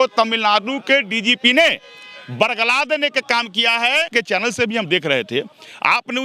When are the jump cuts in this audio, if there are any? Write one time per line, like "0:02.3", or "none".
0:04.1